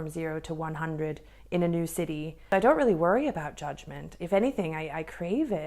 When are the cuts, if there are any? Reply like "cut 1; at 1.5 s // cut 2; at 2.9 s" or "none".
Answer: cut 1; at 2.4 s